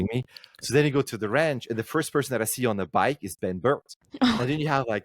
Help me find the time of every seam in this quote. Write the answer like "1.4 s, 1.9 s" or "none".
4.0 s